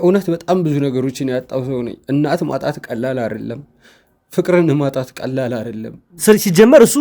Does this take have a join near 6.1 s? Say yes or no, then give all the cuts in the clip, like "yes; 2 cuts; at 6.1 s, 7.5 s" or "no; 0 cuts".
yes; 1 cut; at 6.1 s